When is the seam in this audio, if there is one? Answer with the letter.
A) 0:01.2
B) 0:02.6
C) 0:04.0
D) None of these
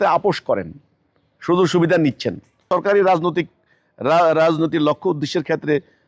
B